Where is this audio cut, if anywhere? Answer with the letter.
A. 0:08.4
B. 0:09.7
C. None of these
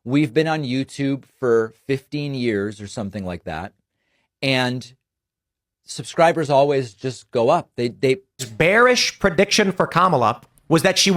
A